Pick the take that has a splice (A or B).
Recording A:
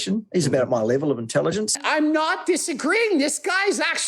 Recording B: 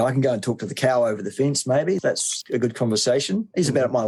A